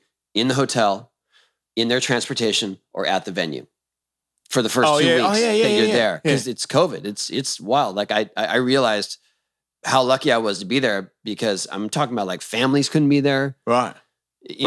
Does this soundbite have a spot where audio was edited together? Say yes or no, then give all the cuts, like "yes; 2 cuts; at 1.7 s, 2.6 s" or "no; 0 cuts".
no; 0 cuts